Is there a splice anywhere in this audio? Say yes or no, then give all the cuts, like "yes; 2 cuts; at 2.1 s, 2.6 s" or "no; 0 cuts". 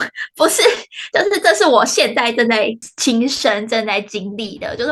yes; 1 cut; at 2.9 s